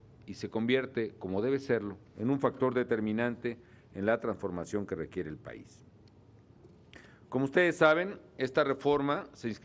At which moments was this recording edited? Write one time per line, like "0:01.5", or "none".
none